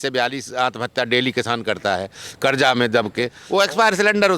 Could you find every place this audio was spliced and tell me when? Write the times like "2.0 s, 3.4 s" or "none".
3.4 s